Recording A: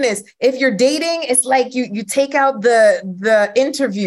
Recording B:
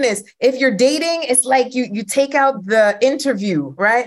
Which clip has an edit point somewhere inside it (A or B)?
B